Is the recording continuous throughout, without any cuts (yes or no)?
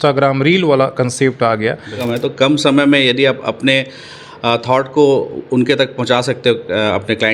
no